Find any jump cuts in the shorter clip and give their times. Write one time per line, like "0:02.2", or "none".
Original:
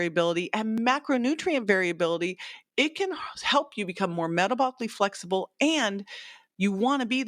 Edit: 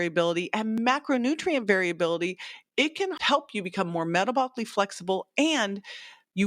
0:03.2